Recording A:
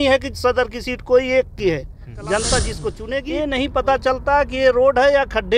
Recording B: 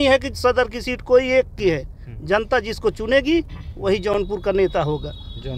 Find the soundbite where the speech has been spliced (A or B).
A